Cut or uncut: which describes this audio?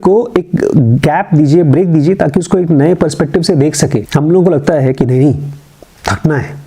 cut